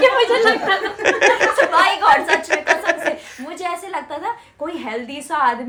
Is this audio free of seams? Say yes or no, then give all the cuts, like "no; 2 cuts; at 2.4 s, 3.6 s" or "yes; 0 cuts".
yes; 0 cuts